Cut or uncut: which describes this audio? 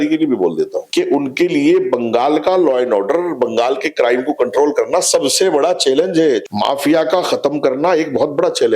cut